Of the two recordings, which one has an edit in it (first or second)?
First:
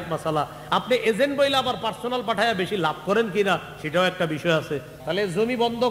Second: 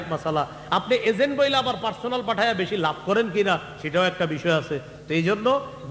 first